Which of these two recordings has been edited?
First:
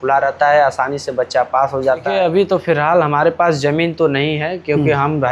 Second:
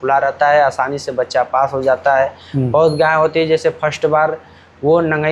first; 1 cut; at 2.1 s

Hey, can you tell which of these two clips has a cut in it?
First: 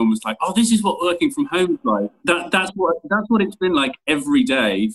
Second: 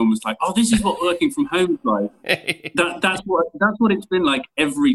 first; 1 cut; at 2.2 s

